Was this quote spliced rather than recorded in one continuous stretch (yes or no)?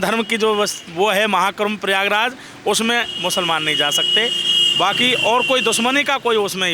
no